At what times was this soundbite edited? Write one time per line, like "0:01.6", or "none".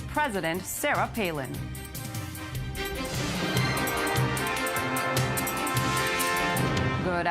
0:06.0